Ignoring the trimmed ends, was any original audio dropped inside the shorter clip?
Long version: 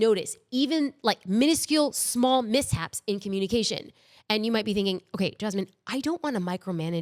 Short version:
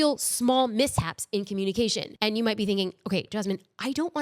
yes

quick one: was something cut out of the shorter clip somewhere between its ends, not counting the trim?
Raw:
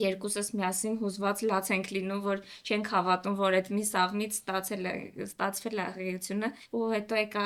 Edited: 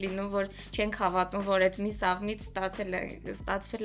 no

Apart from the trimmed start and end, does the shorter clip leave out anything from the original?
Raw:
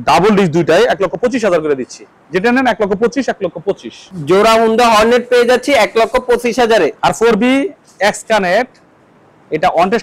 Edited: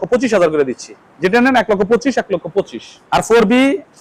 yes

